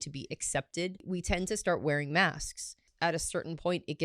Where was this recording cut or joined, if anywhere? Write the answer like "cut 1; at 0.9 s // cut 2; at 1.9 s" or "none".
cut 1; at 1.0 s // cut 2; at 2.8 s